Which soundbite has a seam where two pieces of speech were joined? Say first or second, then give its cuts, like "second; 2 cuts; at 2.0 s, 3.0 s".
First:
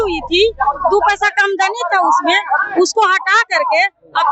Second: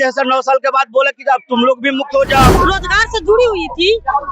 second; 1 cut; at 2.5 s